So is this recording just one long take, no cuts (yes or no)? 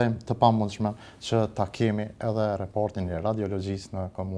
yes